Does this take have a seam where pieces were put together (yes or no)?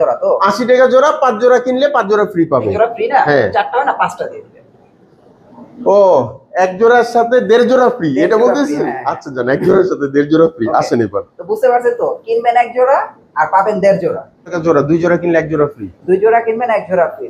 yes